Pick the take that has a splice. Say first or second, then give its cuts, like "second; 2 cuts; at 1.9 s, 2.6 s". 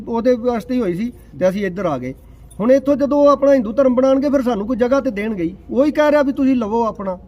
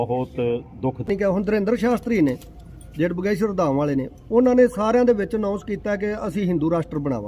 second; 1 cut; at 1.1 s